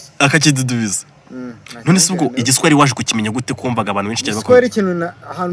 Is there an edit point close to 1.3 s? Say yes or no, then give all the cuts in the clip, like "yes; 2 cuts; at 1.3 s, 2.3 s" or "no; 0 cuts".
no; 0 cuts